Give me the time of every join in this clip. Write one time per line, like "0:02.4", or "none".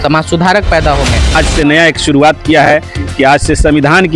0:01.4